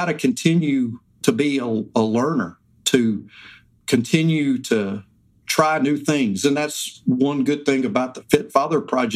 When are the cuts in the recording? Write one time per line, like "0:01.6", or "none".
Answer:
0:01.1